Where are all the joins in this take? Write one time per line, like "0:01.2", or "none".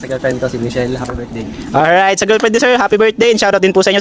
none